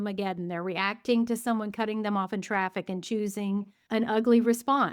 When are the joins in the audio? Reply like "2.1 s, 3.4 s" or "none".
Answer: 3.8 s